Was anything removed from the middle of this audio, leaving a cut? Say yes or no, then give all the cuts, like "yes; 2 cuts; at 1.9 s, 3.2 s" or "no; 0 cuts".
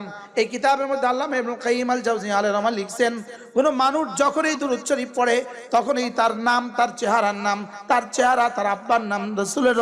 no; 0 cuts